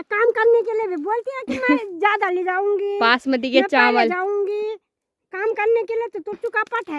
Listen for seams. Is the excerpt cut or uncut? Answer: uncut